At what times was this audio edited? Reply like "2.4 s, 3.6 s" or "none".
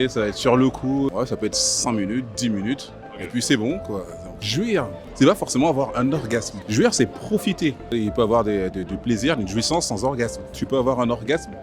1.1 s, 4.5 s, 6.6 s, 7.9 s, 10.5 s